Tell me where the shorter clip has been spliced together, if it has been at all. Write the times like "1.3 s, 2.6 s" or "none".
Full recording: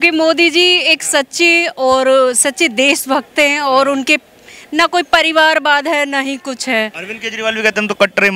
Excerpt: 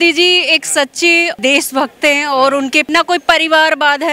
1.4 s, 2.9 s

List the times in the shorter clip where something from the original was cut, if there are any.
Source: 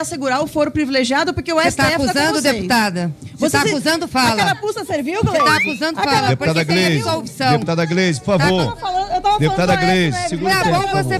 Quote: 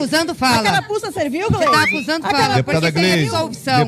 none

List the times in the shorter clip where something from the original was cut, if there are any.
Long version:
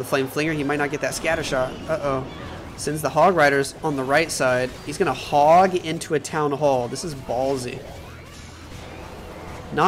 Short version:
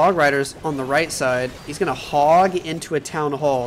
none

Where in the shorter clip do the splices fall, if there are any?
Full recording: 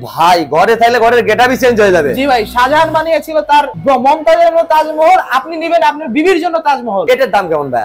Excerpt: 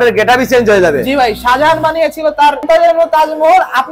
2.6 s

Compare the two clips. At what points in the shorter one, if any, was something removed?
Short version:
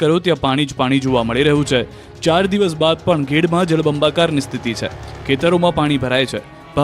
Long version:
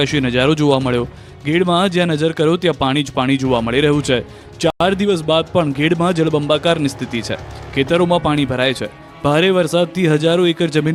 2.3 s

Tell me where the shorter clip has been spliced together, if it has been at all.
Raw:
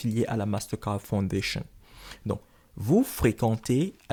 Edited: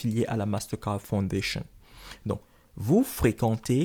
none

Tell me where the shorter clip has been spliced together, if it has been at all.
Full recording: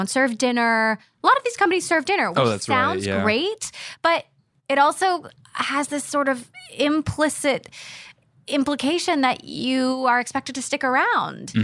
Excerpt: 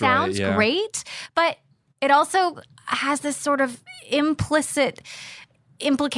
none

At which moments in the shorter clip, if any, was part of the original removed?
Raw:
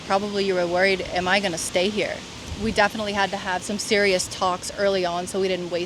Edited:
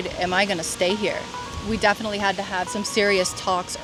none

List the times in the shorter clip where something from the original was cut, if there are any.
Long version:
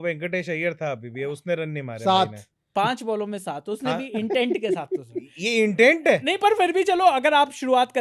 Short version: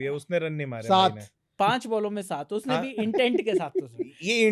none

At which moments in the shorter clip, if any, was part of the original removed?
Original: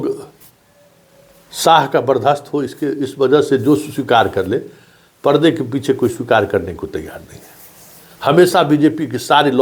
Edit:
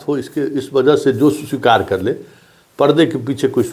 none

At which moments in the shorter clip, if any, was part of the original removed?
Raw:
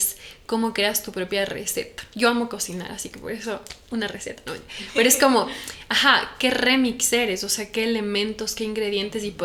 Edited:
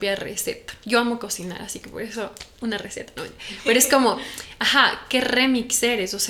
none

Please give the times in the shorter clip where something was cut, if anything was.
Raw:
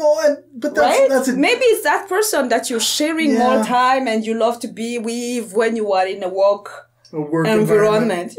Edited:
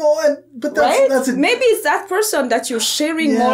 none

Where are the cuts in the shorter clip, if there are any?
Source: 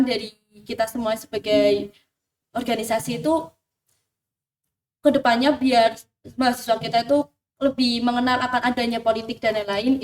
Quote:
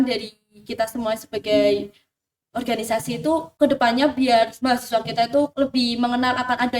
3.5 s, 4.6 s, 5.5 s

